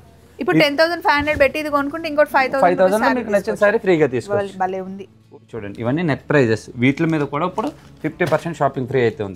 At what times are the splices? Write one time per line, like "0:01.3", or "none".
0:05.2